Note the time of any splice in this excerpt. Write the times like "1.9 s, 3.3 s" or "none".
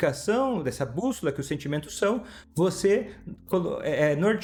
none